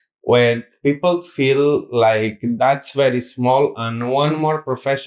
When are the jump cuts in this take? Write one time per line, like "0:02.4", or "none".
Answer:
none